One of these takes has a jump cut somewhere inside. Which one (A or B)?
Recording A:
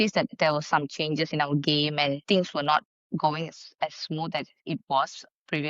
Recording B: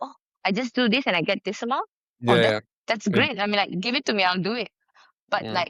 A